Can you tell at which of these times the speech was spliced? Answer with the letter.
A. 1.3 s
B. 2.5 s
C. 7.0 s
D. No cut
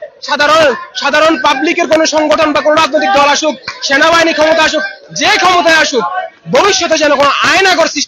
D